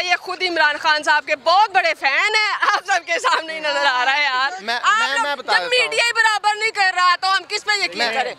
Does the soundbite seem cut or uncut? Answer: uncut